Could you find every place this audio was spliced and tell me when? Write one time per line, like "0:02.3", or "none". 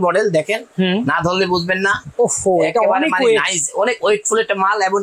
none

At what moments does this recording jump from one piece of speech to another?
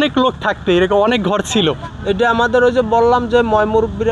0:01.9

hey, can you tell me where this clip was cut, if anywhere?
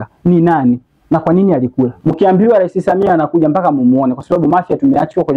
0:02.0

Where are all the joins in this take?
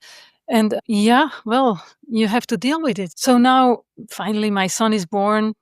0:03.1
0:03.9

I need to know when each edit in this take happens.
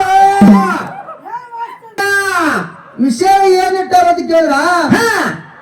0:02.0

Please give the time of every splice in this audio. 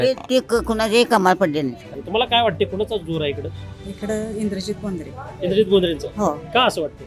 0:02.0

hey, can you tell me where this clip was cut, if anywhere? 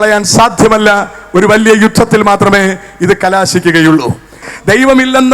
0:04.4

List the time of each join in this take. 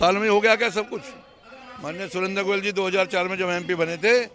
none

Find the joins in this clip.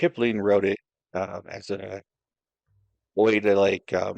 none

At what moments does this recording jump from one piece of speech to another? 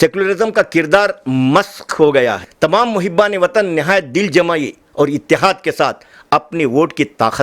0:02.4

